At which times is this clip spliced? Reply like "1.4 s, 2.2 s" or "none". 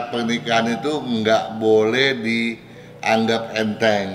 none